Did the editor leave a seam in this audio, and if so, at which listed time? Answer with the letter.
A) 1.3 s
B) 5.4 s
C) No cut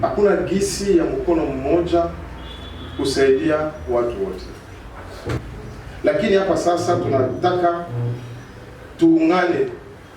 B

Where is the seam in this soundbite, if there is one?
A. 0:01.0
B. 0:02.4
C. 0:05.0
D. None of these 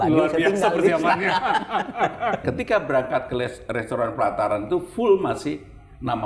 B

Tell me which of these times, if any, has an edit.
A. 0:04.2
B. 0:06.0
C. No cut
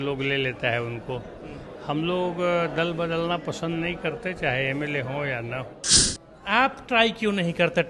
B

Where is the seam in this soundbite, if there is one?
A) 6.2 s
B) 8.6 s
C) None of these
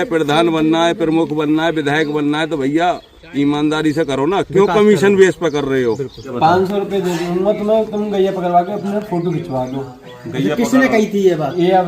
A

